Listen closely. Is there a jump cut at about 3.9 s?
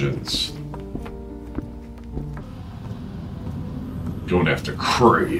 no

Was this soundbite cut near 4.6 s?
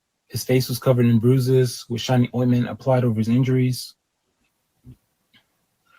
yes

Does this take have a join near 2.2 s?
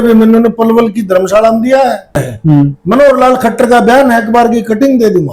yes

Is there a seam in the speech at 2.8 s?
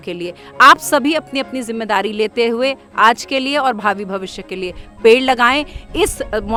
no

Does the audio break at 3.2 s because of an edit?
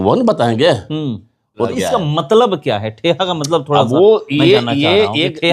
no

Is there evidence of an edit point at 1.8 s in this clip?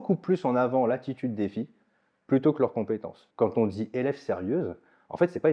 no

